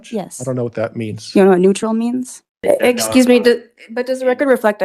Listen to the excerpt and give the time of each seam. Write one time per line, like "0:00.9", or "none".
0:02.5

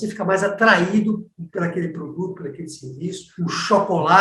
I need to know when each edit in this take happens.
0:03.3

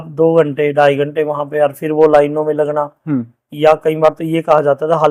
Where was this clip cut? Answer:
none

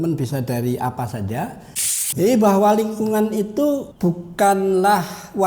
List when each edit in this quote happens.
0:01.9
0:03.9

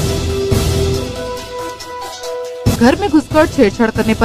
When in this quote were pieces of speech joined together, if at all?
0:01.4

